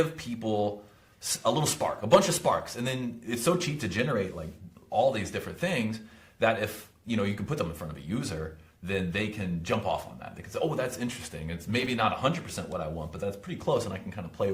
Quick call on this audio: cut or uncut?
uncut